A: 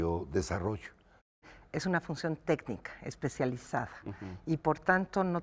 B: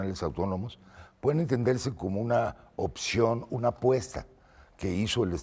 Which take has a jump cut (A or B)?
A